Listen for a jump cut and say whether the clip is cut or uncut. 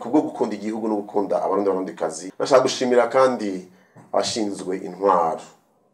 cut